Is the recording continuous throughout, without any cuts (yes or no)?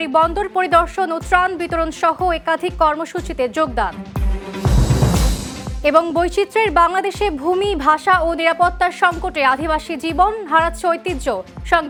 yes